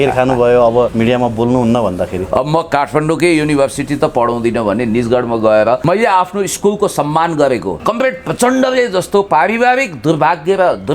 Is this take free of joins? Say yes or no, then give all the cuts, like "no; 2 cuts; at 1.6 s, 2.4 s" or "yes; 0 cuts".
no; 3 cuts; at 0.9 s, 5.8 s, 7.7 s